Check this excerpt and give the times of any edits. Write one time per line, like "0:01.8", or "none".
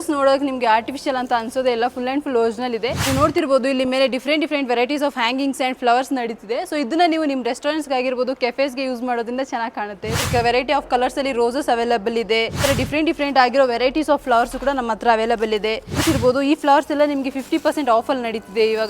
0:03.0
0:10.2
0:12.7
0:15.9